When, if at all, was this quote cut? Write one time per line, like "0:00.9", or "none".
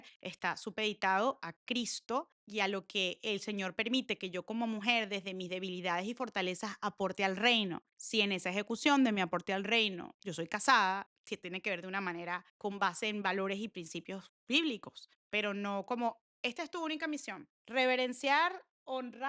none